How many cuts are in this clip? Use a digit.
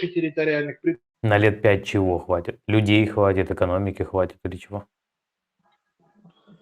1